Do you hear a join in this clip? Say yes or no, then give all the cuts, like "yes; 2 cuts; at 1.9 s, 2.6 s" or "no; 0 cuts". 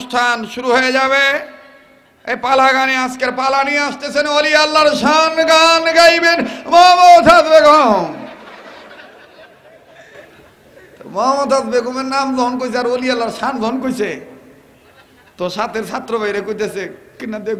no; 0 cuts